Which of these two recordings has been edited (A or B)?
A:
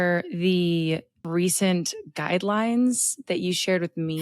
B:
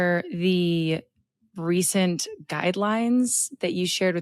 A